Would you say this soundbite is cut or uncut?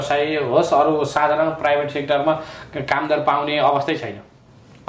uncut